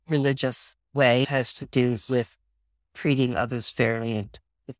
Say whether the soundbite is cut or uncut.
cut